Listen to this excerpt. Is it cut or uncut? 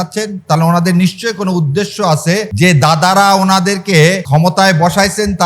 cut